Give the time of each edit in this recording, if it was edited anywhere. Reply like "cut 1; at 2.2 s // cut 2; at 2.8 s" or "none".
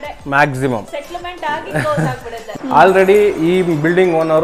cut 1; at 2.5 s